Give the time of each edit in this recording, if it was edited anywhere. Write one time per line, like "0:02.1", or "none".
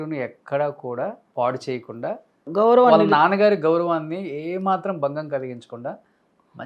0:01.2
0:02.4